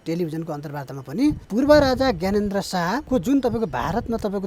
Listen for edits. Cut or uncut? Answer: cut